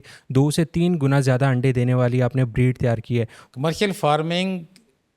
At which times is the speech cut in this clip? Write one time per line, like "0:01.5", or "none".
0:03.4